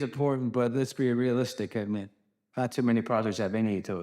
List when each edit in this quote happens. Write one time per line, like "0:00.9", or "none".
none

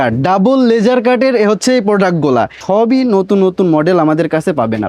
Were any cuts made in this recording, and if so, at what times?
0:02.6

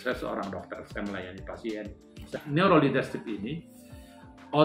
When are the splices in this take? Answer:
0:02.4

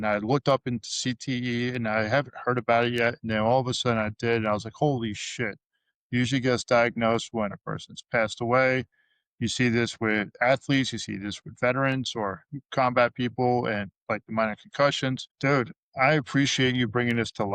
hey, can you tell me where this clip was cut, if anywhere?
0:15.3

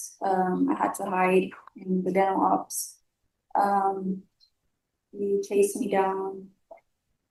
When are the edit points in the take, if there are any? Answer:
none

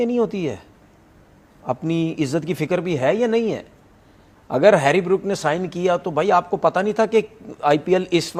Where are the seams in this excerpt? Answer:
none

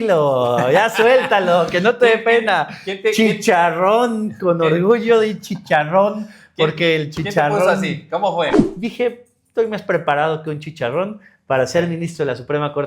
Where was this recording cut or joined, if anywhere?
0:08.5

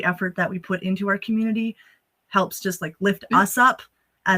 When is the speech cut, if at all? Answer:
none

